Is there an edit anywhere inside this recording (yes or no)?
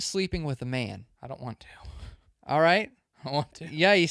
no